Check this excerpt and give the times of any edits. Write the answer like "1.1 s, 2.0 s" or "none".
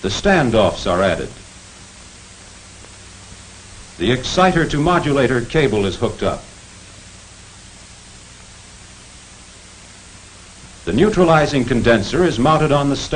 3.9 s